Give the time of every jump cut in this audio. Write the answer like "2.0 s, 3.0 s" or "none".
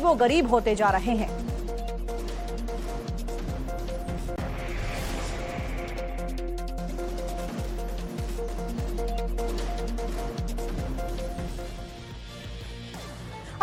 none